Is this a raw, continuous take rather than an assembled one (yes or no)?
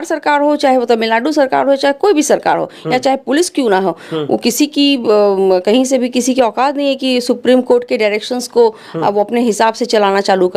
yes